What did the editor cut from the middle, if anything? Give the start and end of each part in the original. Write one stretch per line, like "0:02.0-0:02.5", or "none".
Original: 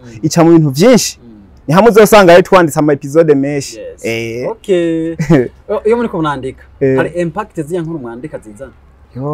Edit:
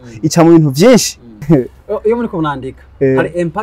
0:01.3-0:05.1